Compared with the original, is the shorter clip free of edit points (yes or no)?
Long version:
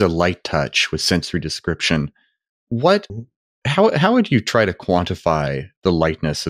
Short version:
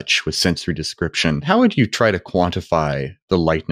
no